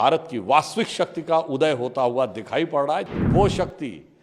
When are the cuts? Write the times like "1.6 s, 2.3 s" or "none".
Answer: 3.3 s